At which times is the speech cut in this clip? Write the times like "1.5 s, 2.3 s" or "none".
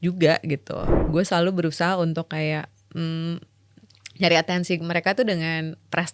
0.9 s